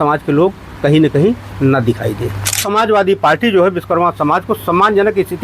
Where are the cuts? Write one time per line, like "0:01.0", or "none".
0:02.6